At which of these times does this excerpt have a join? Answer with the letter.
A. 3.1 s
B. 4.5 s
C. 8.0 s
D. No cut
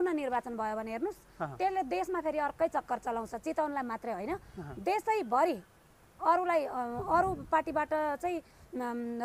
D